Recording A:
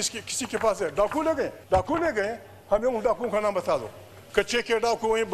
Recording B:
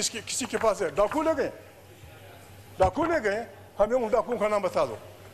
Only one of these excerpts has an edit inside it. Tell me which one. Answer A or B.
A